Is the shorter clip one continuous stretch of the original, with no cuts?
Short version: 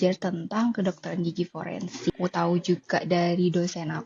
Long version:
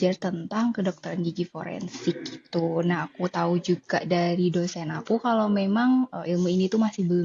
no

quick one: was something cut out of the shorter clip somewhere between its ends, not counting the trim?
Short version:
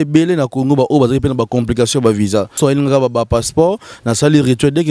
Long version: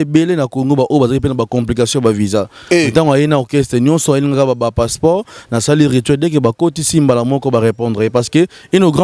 yes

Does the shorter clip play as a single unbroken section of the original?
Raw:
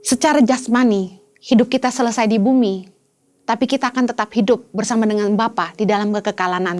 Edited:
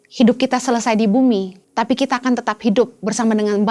no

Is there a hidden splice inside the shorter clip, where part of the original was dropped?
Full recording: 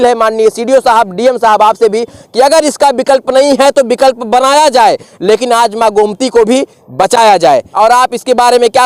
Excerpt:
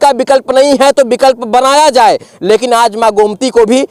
no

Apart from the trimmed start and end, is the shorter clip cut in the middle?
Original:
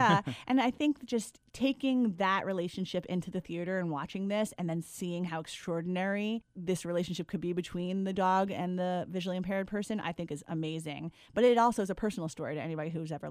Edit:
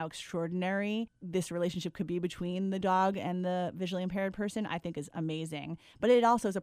no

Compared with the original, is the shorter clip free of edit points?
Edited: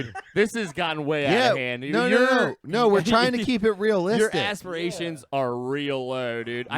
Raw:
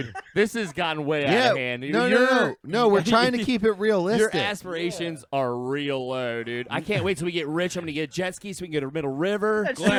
yes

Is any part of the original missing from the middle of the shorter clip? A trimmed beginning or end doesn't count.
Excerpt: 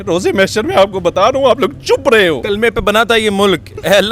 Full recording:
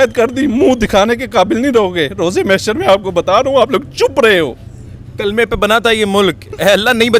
yes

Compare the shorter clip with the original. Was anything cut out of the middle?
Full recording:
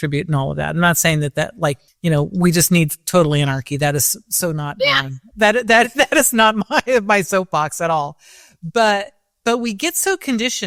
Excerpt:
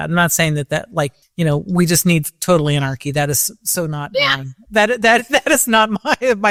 no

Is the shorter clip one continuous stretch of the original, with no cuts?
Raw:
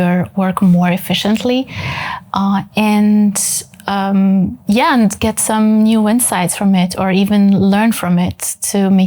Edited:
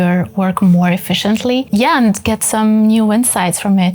no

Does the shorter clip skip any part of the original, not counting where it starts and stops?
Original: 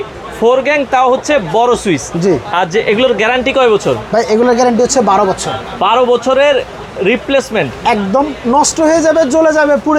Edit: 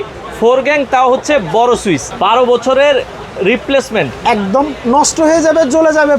yes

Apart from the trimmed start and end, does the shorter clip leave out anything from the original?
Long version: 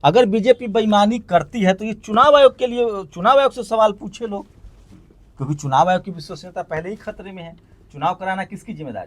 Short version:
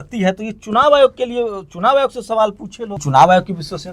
yes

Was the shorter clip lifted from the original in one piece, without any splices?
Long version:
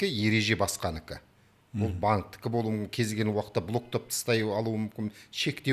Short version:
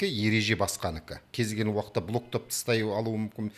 no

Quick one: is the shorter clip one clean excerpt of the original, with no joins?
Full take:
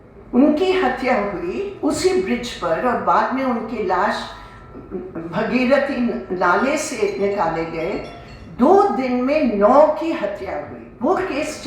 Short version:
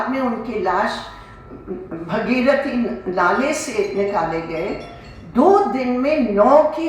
yes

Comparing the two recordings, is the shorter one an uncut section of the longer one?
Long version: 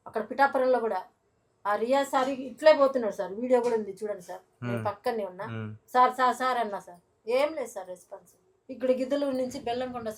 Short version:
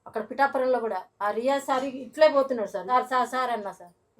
no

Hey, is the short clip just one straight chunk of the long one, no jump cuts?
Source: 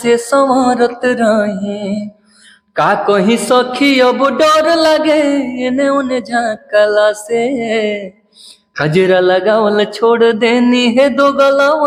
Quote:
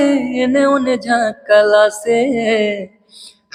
yes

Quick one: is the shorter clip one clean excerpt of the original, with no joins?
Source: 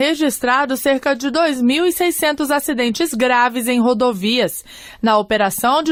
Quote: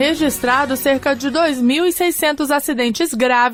yes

